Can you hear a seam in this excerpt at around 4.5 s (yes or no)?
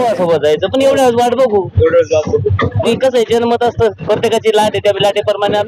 no